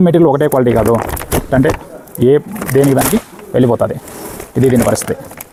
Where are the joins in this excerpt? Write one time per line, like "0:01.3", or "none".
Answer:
none